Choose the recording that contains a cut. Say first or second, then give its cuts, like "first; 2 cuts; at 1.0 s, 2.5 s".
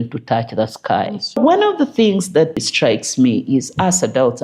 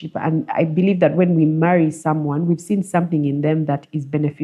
first; 2 cuts; at 1.4 s, 2.6 s